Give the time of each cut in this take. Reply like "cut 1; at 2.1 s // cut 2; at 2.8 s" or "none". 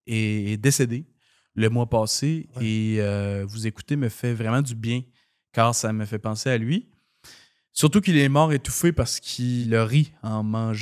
cut 1; at 9.6 s